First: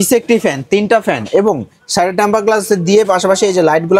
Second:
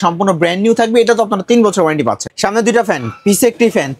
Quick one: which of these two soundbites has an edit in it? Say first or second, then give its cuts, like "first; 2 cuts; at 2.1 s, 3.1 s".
second; 1 cut; at 2.3 s